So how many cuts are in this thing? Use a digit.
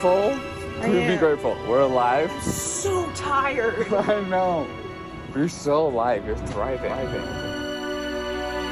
0